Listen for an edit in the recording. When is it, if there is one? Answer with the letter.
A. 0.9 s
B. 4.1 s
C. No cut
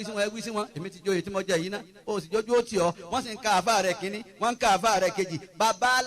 C